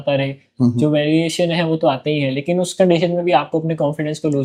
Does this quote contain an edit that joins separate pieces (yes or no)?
no